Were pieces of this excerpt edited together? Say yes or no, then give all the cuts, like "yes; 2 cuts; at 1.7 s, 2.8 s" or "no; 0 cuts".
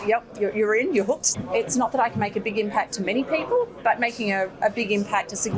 yes; 1 cut; at 1.3 s